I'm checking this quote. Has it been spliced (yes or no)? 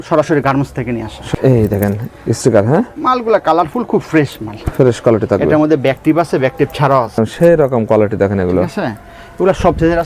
yes